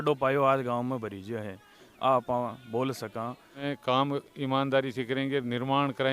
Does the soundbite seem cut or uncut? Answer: cut